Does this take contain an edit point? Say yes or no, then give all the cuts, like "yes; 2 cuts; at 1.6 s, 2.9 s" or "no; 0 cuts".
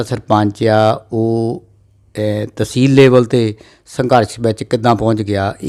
no; 0 cuts